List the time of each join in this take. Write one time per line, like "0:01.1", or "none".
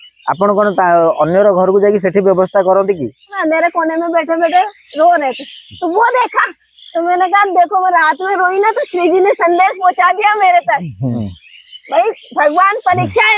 0:03.4
0:11.2